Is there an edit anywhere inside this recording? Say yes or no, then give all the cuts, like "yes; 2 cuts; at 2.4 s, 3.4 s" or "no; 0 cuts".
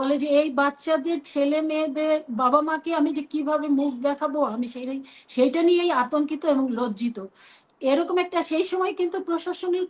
no; 0 cuts